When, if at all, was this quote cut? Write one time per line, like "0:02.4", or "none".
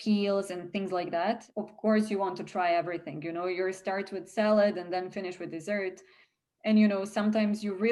0:01.5